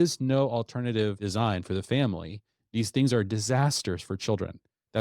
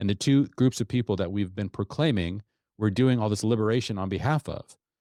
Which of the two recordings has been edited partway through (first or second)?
first